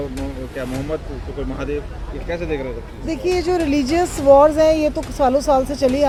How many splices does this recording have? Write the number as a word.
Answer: zero